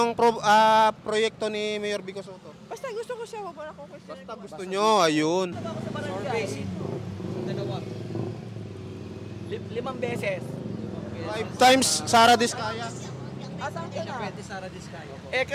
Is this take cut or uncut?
cut